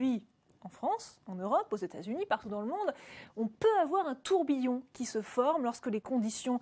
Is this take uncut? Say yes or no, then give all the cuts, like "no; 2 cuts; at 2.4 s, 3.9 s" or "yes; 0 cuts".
no; 1 cut; at 1.6 s